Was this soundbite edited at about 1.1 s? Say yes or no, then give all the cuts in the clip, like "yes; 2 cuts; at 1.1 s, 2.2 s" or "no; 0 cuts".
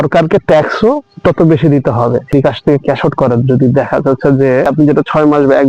no; 2 cuts; at 2.3 s, 4.7 s